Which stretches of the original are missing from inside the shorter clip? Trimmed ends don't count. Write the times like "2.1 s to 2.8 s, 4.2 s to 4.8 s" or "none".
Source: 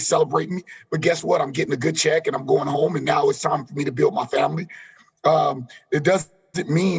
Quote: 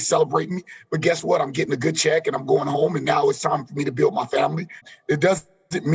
4.9 s to 5.7 s